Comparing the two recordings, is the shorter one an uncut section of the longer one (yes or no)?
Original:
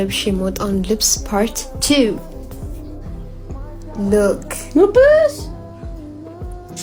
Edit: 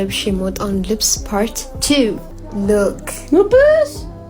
no